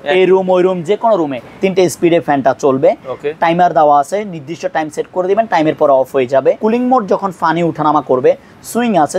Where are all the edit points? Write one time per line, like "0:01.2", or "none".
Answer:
0:01.4
0:06.6